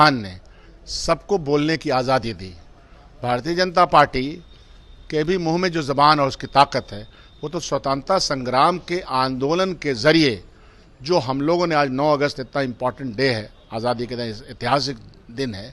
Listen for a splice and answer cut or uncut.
uncut